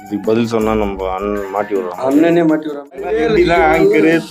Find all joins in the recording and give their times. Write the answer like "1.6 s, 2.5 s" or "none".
2.9 s